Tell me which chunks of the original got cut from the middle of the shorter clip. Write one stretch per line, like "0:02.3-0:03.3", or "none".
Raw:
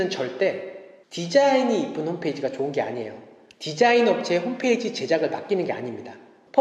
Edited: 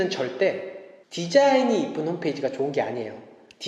none